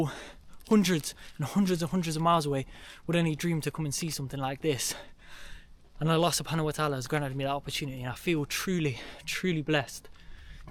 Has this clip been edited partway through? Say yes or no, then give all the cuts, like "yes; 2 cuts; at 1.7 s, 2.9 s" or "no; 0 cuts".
no; 0 cuts